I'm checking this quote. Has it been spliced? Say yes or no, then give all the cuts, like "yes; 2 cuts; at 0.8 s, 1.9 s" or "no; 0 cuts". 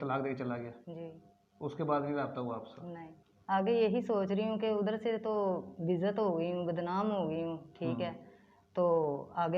yes; 1 cut; at 3.0 s